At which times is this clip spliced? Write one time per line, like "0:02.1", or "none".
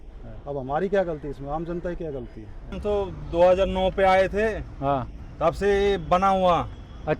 0:02.8